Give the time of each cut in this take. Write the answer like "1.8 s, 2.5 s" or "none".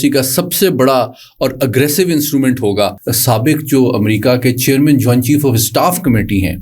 3.1 s